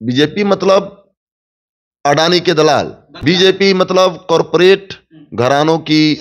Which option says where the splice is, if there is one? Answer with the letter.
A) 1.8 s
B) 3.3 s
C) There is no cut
B